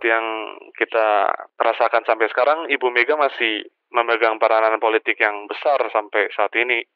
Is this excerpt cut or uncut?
uncut